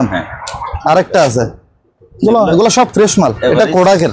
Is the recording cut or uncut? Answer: uncut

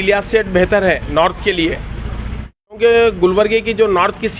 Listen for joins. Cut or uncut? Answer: cut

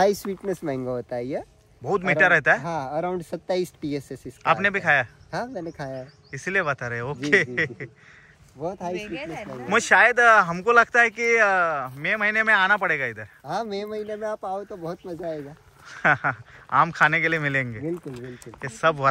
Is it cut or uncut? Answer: uncut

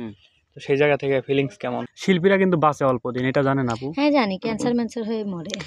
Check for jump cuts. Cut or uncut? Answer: cut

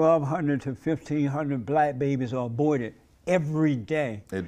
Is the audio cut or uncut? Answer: uncut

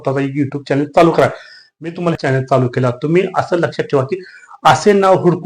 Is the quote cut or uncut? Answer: cut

